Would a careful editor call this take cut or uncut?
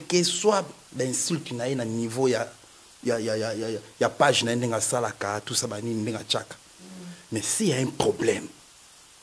uncut